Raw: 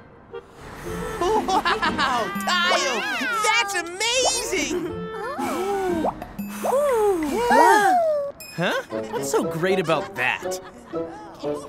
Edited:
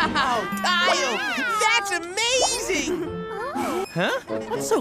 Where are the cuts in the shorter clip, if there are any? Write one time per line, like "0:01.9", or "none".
0:03.8

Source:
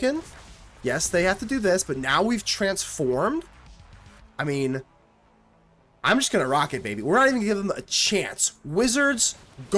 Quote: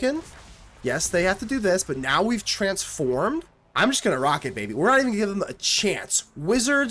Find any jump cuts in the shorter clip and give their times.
0:03.6

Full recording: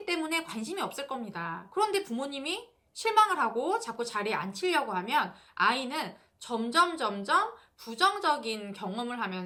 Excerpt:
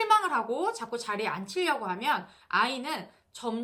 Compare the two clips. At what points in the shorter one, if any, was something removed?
none

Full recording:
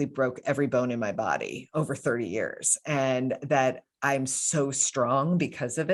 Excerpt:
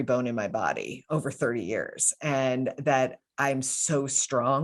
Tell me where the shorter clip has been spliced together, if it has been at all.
none

